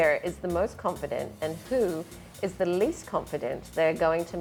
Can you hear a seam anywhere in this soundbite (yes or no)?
no